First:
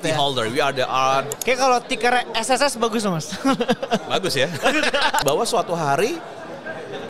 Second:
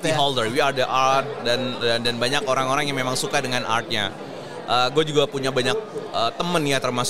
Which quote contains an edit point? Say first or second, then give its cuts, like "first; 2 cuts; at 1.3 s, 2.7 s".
first; 2 cuts; at 1.3 s, 5.2 s